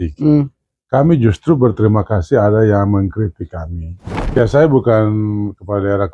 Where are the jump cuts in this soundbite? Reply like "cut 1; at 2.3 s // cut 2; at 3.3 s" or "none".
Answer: cut 1; at 4.4 s